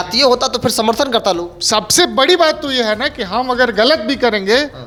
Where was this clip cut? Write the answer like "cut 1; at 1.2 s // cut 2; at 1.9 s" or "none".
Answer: none